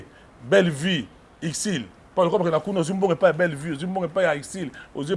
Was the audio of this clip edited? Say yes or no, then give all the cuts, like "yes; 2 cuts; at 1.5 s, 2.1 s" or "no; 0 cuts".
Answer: no; 0 cuts